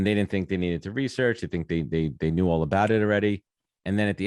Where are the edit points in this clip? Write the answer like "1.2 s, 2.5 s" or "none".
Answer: none